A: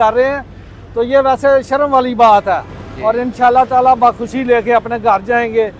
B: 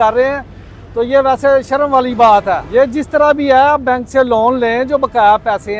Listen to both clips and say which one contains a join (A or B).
A